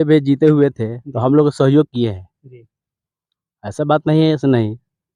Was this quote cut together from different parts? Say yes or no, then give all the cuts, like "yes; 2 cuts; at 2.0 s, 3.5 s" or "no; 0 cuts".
no; 0 cuts